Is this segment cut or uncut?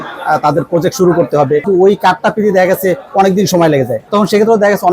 cut